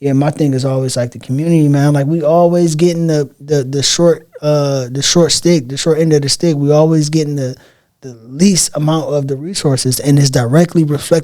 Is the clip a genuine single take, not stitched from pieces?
yes; 0 cuts

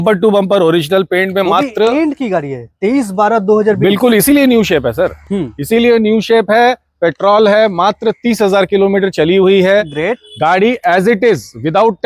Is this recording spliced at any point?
no; 0 cuts

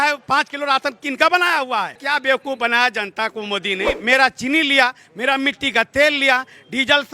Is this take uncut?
no; 2 cuts; at 2.0 s, 4.0 s

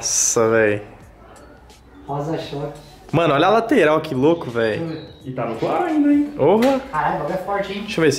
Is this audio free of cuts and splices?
yes; 0 cuts

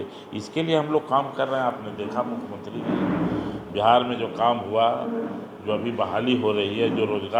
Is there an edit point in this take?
no; 0 cuts

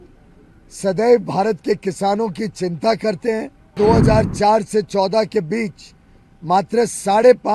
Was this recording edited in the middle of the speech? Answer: yes; 1 cut; at 3.7 s

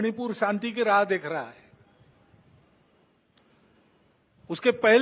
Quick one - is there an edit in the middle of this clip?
no; 0 cuts

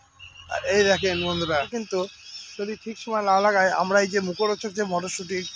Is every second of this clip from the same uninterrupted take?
no; 1 cut; at 1.7 s

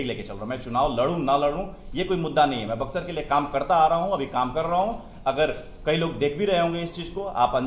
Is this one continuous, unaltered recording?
yes; 0 cuts

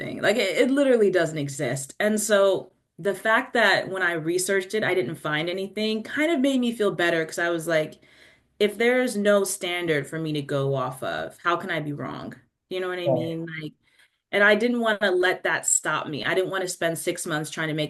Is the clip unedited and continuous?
yes; 0 cuts

